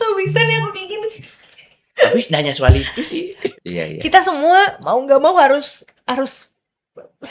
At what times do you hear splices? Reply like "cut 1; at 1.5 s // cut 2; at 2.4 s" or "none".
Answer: cut 1; at 3.5 s